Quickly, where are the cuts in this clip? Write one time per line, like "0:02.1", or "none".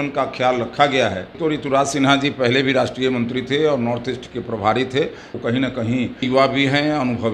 0:01.3
0:05.3
0:06.2